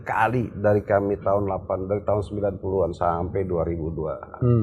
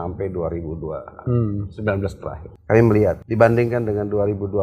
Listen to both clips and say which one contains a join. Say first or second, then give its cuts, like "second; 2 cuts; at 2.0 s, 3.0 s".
second; 2 cuts; at 2.5 s, 3.2 s